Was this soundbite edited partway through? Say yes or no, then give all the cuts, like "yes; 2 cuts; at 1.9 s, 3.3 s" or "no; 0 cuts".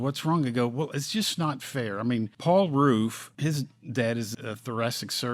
yes; 3 cuts; at 2.3 s, 3.3 s, 4.3 s